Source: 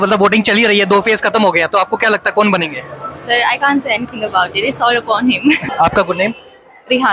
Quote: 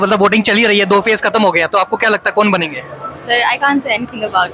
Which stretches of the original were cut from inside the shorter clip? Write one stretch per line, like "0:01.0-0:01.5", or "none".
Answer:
none